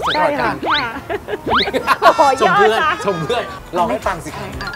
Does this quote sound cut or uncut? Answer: cut